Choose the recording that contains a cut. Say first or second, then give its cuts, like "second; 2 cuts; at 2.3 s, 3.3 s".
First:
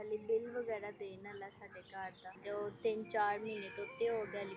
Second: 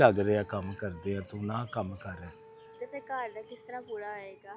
first; 1 cut; at 2.4 s